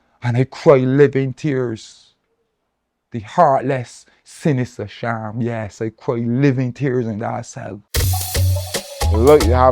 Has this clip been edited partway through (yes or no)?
yes